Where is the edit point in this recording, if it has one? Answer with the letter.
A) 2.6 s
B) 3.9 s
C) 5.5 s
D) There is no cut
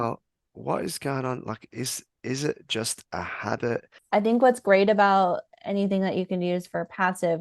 B